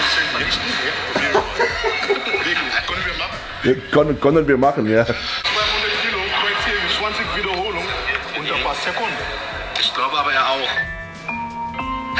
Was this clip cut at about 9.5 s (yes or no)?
no